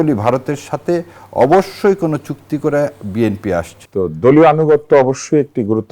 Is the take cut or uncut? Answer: cut